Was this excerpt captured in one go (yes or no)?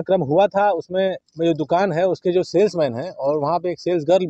no